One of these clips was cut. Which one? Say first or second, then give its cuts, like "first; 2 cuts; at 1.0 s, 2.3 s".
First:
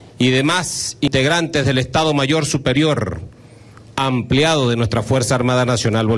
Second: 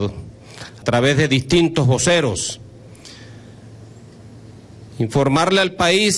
first; 1 cut; at 1.1 s